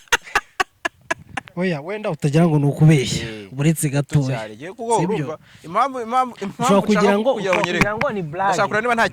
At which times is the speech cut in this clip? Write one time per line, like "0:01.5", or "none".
0:01.4